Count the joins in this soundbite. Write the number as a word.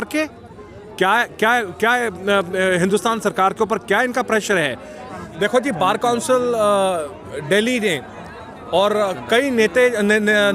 one